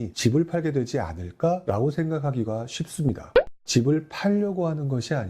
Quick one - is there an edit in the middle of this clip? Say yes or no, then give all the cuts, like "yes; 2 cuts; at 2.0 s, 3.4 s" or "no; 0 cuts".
yes; 1 cut; at 3.4 s